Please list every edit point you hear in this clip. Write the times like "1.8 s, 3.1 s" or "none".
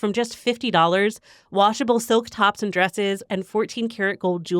3.2 s